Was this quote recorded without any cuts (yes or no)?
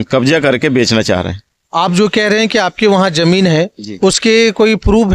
yes